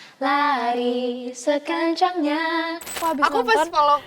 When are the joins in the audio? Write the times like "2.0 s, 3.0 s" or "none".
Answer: 2.9 s